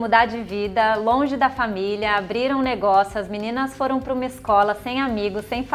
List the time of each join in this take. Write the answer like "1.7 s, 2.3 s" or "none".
none